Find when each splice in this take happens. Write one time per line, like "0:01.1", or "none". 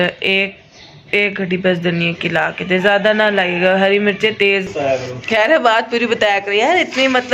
0:04.7

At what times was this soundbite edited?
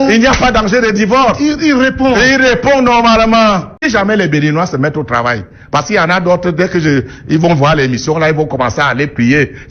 0:03.9

